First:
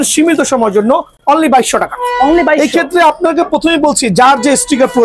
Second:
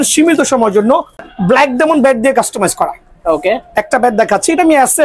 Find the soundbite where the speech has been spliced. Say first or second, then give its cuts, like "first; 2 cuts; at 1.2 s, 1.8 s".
second; 1 cut; at 1.2 s